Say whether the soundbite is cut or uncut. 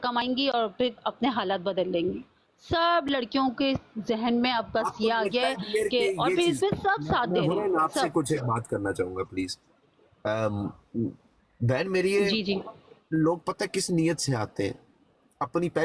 uncut